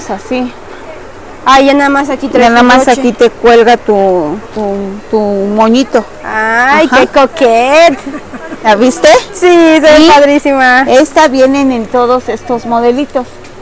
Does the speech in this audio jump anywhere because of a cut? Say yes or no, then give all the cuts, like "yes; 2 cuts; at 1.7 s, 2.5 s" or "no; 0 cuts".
no; 0 cuts